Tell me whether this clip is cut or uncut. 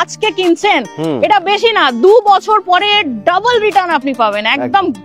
uncut